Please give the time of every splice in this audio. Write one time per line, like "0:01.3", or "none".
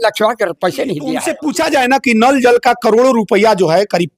0:01.4